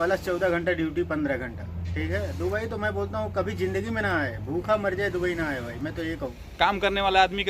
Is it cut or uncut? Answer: cut